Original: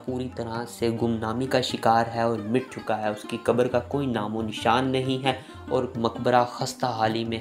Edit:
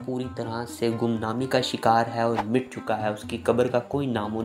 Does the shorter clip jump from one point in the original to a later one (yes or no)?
no